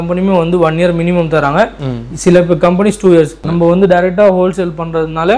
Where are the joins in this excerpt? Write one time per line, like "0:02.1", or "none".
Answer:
0:03.4